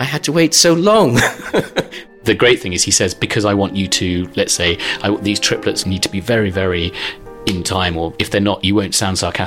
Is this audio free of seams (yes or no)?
no